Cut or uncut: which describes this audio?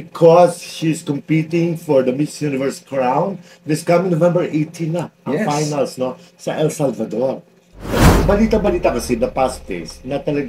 cut